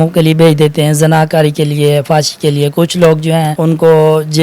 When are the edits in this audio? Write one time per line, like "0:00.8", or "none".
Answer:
0:03.5